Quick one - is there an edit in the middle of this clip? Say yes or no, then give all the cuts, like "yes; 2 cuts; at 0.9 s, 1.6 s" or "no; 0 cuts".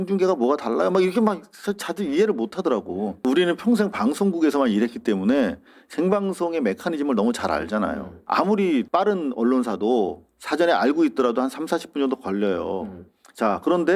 yes; 3 cuts; at 3.2 s, 8.1 s, 8.9 s